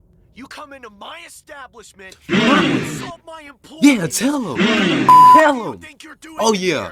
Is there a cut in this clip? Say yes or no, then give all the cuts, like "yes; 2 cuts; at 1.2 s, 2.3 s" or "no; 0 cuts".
no; 0 cuts